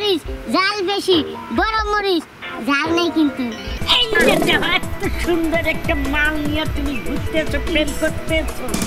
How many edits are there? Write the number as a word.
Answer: one